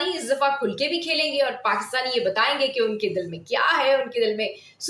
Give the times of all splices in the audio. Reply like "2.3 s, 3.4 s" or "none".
none